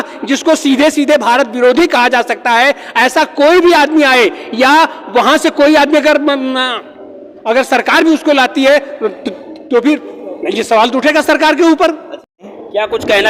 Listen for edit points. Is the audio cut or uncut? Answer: cut